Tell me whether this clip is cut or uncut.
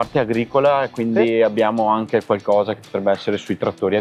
uncut